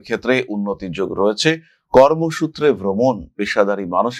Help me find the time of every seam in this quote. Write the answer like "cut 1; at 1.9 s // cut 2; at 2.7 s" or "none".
none